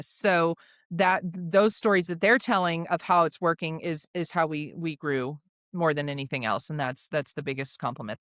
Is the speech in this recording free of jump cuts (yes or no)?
yes